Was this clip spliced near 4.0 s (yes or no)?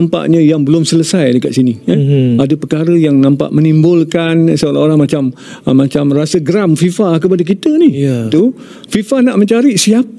no